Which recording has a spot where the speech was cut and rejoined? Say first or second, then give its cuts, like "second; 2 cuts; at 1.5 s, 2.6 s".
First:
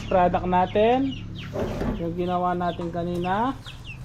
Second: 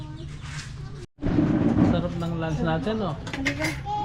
second; 1 cut; at 1.1 s